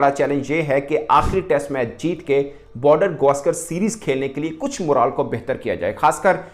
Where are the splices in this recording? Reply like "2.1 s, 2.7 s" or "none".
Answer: none